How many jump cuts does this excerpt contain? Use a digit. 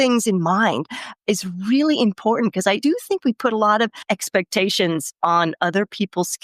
2